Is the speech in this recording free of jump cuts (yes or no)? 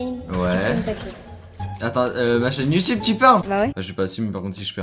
no